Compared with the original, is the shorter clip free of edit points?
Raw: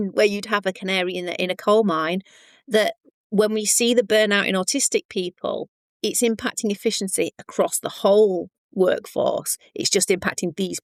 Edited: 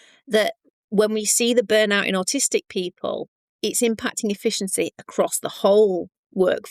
yes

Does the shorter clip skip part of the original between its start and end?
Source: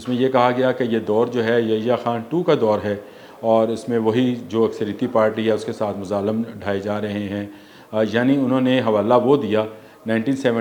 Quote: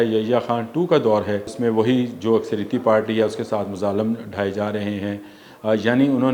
yes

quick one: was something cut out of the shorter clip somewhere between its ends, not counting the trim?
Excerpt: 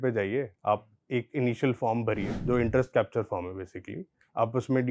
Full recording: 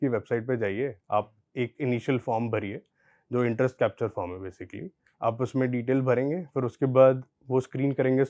yes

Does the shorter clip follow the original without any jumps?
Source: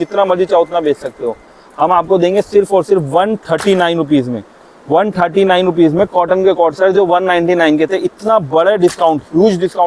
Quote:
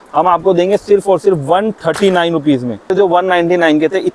no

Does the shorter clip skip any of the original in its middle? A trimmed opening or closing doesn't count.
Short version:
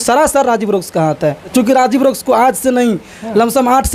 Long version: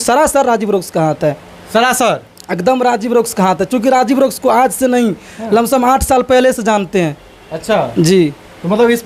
yes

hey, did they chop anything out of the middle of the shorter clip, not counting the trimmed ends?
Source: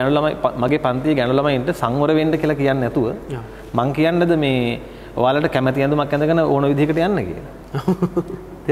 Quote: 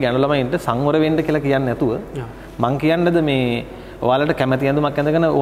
no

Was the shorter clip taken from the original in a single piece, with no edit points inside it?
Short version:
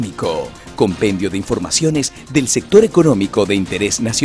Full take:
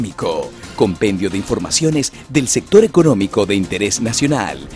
yes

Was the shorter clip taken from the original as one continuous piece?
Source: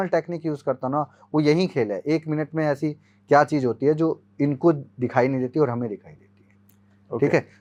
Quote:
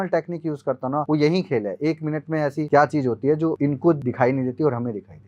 no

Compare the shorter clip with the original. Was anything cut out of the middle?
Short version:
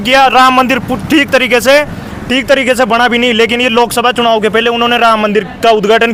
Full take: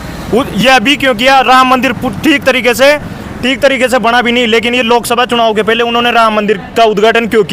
no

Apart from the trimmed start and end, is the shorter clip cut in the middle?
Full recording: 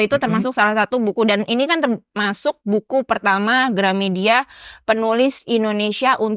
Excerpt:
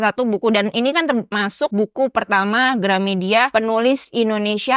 yes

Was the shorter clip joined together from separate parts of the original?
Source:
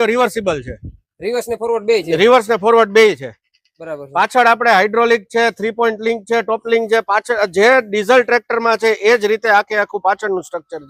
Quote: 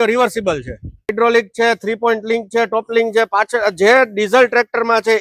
yes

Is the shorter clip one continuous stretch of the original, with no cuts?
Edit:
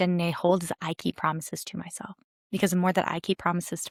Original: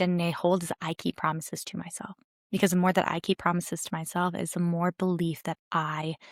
yes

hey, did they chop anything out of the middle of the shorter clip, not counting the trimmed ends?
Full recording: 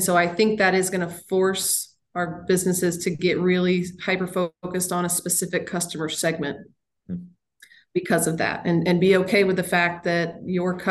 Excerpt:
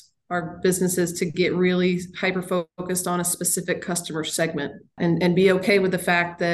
yes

